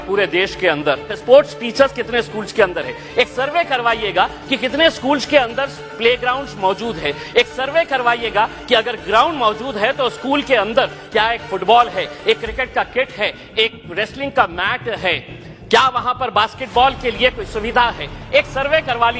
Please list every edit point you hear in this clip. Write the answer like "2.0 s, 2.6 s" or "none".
1.1 s